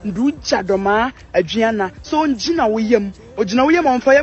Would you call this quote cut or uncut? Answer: uncut